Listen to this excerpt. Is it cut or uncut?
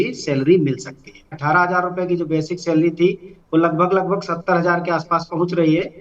cut